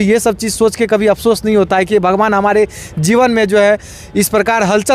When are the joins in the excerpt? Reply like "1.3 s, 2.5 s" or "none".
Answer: none